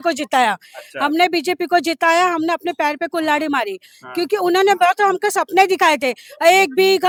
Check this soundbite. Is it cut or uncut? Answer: uncut